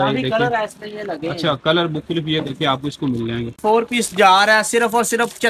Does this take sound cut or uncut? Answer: cut